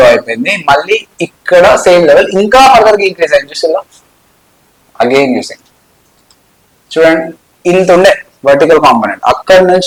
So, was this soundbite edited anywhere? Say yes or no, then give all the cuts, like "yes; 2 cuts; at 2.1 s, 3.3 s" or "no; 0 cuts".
no; 0 cuts